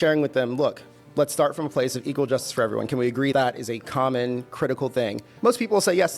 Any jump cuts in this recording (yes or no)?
yes